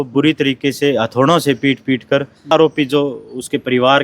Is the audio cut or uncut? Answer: cut